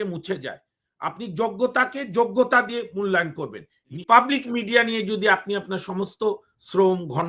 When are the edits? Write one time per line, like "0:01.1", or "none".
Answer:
0:04.0